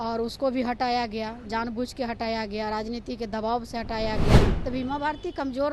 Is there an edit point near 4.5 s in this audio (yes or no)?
yes